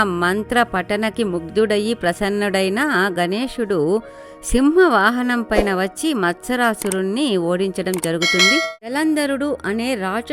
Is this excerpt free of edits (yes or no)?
no